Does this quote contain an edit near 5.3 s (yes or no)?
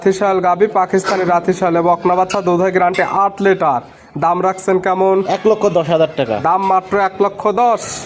no